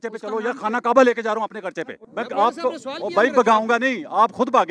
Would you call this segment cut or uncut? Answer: cut